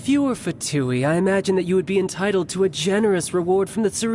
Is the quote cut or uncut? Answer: uncut